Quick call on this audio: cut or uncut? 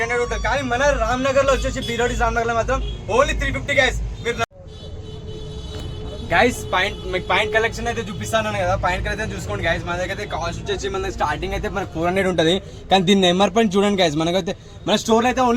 cut